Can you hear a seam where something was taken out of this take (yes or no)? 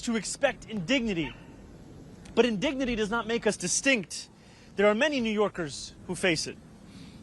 no